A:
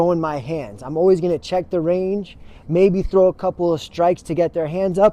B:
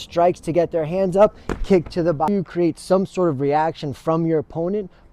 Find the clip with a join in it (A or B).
B